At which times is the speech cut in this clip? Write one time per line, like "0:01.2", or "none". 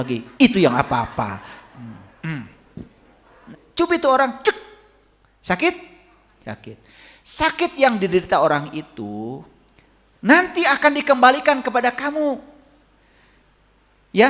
0:03.4